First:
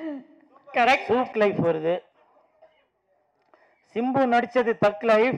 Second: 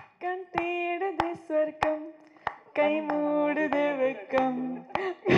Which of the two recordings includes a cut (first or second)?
first